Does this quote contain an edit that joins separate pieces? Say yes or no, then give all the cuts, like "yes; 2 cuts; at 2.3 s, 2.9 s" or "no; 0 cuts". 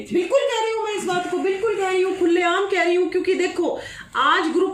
no; 0 cuts